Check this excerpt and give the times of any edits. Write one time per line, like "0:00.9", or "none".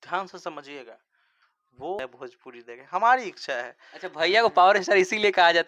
0:02.0